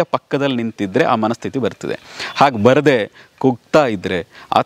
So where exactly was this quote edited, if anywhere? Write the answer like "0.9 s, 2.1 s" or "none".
none